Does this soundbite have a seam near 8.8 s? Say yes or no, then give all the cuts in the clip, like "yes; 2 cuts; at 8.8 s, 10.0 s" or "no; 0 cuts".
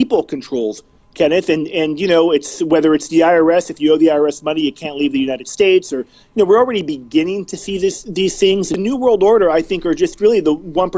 yes; 1 cut; at 8.8 s